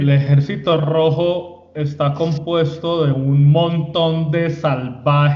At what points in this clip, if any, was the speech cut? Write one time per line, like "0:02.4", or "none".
none